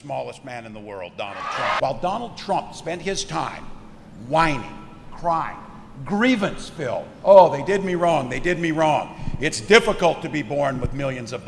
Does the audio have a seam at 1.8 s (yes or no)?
yes